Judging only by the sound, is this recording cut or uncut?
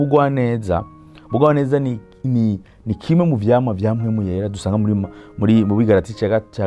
uncut